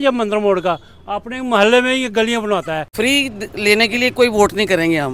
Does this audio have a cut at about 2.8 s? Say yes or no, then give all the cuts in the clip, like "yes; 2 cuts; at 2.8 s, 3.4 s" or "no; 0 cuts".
yes; 1 cut; at 2.8 s